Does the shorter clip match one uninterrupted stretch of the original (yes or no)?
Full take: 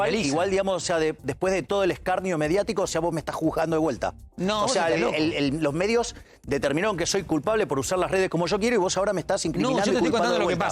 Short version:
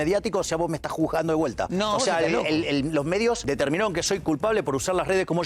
no